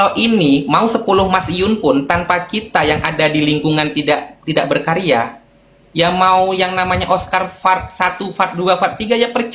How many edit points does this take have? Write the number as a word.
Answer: zero